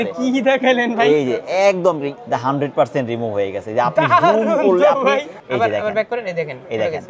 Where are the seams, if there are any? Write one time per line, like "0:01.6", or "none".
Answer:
0:02.1
0:05.3